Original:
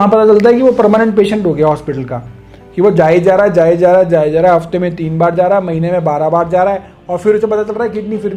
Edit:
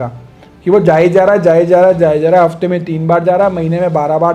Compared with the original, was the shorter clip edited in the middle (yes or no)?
no